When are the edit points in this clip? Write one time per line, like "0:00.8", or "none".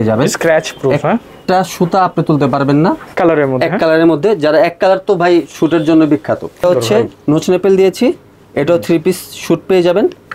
0:03.1
0:06.6